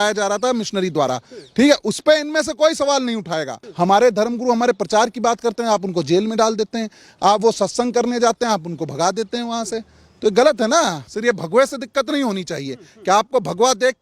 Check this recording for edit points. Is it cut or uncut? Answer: cut